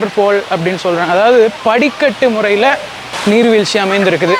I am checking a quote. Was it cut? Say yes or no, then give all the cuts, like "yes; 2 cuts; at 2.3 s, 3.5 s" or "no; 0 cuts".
yes; 1 cut; at 3.0 s